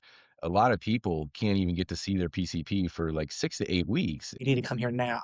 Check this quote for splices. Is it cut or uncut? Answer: cut